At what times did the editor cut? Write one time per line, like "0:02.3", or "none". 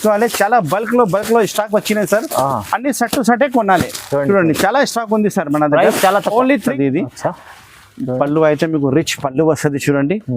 0:06.8